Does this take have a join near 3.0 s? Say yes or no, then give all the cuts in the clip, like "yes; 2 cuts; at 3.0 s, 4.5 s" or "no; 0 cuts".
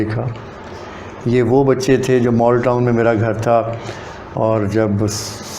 no; 0 cuts